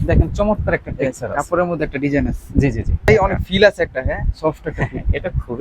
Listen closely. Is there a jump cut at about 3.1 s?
yes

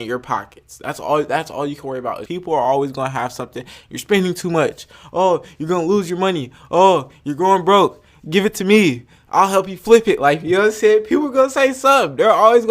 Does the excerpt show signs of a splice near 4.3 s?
no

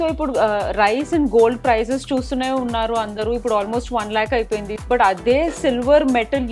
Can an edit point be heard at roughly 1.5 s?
no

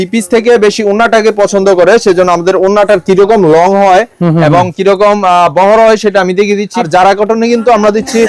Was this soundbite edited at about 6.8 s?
yes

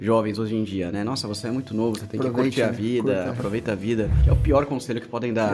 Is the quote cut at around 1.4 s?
no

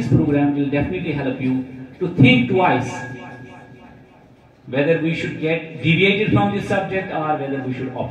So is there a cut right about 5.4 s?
no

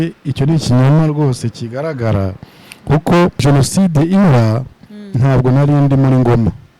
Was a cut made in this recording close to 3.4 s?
yes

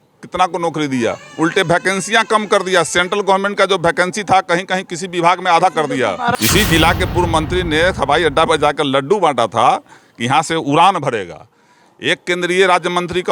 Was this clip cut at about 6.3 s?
yes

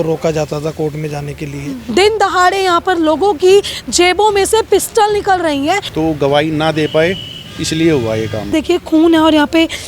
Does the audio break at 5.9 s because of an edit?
yes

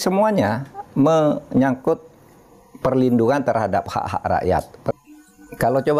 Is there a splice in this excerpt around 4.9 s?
yes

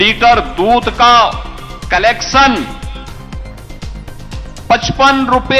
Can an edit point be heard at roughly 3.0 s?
no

